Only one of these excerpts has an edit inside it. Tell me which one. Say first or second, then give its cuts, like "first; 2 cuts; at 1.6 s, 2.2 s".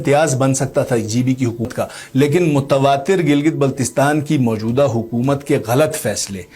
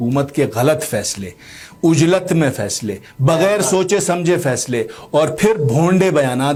first; 1 cut; at 1.7 s